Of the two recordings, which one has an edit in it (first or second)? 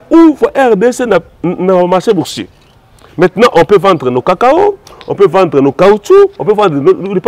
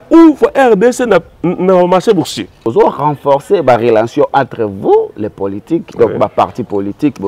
second